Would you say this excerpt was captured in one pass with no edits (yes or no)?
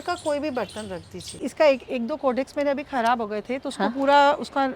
no